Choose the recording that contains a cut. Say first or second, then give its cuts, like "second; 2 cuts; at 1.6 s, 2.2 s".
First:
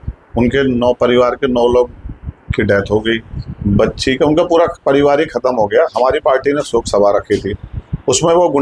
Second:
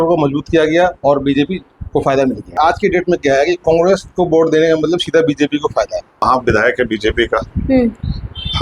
second; 2 cuts; at 2.6 s, 6.2 s